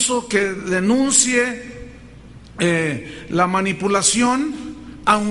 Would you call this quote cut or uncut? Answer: cut